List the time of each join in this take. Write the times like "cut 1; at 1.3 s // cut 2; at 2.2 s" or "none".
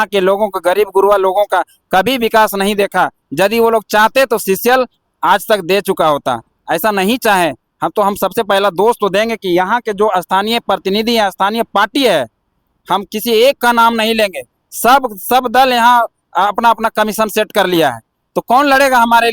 none